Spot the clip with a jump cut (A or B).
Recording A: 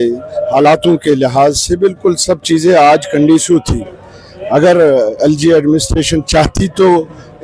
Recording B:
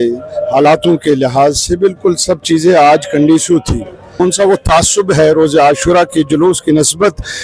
B